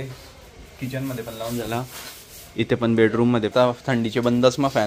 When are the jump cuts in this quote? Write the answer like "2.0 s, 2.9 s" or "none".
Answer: 3.5 s